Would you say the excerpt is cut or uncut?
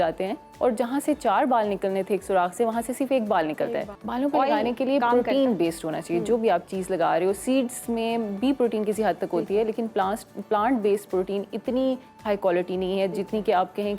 cut